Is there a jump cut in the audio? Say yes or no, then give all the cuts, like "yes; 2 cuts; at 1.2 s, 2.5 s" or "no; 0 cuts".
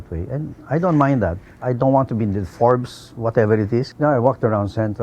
yes; 2 cuts; at 1.5 s, 3.9 s